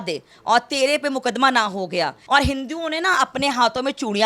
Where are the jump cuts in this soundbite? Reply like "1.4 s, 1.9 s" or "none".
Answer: 2.2 s